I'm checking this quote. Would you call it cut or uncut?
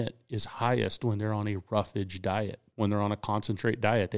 cut